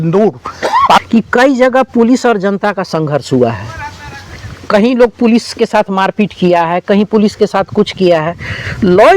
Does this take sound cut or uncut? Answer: cut